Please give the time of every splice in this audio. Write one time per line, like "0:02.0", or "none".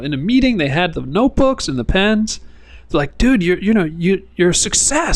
none